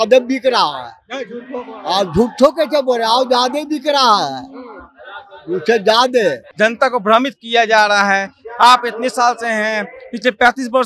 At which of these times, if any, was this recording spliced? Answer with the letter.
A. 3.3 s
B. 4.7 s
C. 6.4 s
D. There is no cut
C